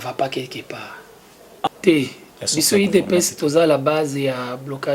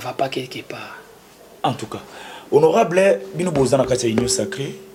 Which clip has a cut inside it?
first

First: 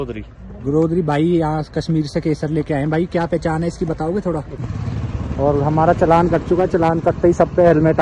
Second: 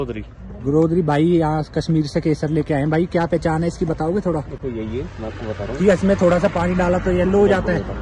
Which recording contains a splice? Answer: first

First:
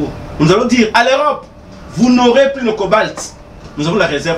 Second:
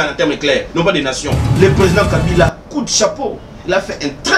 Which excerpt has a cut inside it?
second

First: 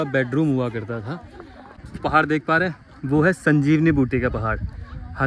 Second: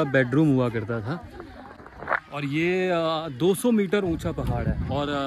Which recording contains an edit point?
first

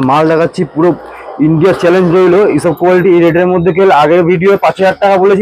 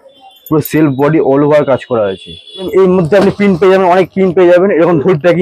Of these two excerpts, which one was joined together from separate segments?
second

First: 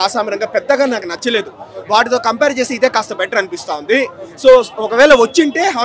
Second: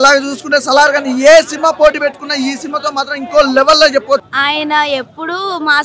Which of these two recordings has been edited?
second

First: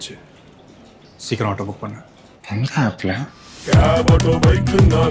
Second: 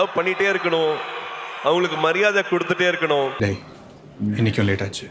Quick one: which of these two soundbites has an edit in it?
second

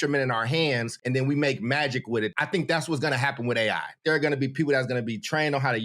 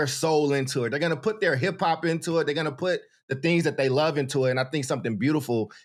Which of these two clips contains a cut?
first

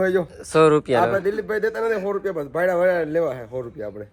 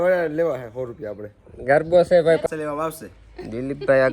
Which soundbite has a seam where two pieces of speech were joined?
second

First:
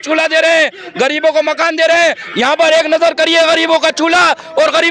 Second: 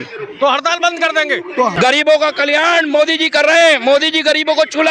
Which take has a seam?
second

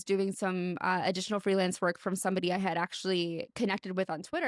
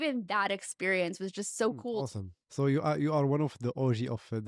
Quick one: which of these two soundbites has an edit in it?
second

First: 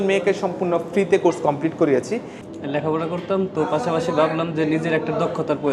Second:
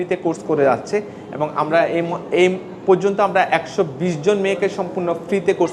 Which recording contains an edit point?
first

